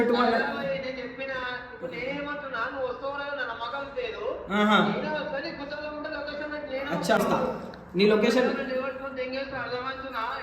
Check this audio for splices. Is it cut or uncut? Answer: cut